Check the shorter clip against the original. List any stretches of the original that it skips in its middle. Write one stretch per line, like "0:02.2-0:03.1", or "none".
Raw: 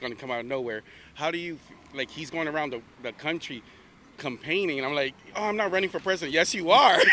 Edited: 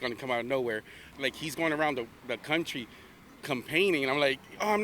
0:01.0-0:01.7